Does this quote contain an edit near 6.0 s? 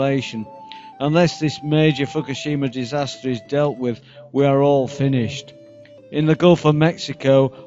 no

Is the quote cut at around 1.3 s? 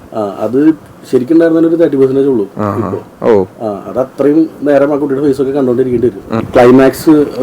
no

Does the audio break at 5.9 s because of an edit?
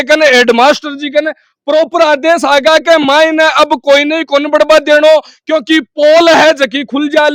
no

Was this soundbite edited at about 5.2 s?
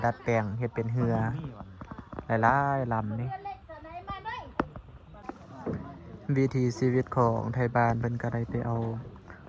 yes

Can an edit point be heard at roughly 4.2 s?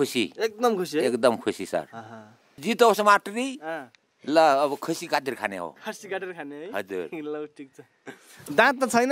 no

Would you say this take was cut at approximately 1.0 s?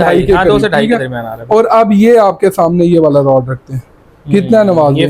no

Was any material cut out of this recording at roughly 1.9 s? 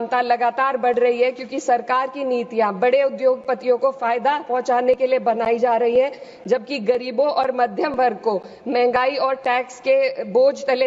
no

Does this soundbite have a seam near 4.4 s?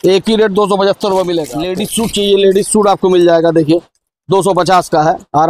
no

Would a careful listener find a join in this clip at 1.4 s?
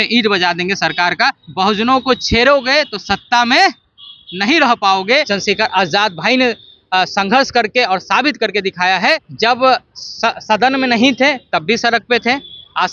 yes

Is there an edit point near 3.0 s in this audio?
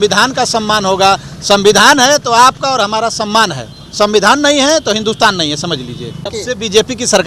no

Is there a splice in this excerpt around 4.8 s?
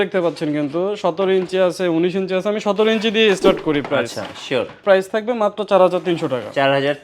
yes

